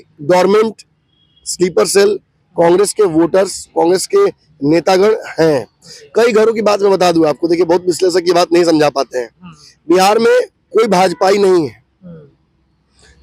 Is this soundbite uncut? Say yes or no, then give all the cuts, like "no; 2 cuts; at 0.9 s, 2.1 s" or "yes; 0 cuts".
yes; 0 cuts